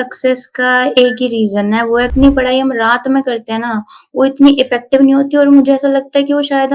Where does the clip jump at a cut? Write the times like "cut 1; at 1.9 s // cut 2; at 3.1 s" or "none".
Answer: cut 1; at 2.1 s

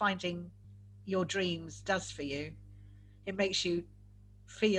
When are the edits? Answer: none

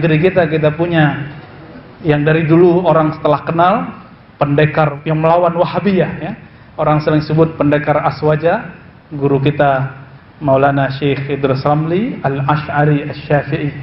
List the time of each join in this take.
cut 1; at 4.9 s

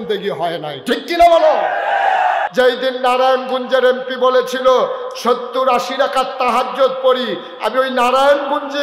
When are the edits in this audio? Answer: cut 1; at 2.5 s

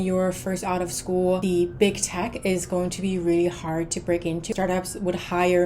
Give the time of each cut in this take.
cut 1; at 1.4 s // cut 2; at 4.5 s

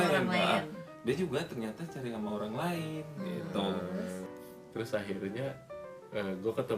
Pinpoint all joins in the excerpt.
cut 1; at 4.2 s

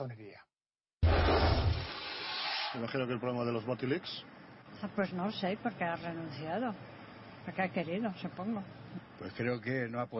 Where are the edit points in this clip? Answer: cut 1; at 1.4 s

